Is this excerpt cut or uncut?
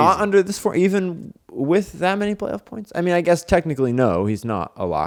uncut